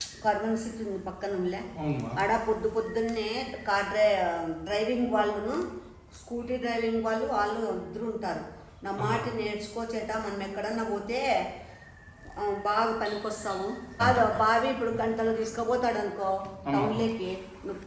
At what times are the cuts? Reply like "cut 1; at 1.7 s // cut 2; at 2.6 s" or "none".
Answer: cut 1; at 14.0 s

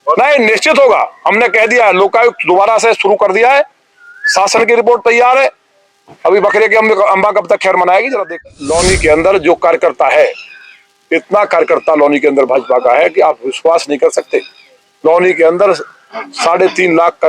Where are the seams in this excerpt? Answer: cut 1; at 8.5 s

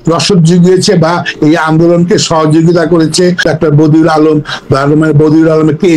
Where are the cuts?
cut 1; at 3.4 s

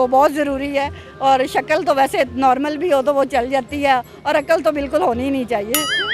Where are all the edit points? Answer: none

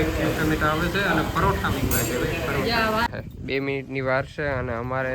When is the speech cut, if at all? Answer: cut 1; at 3.1 s

